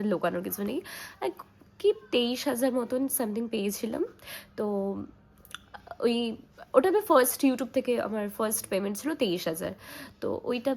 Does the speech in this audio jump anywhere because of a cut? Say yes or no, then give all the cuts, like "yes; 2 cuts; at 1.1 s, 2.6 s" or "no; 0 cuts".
no; 0 cuts